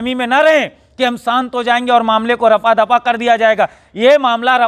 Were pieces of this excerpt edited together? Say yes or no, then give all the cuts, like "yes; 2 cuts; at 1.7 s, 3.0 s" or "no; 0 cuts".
no; 0 cuts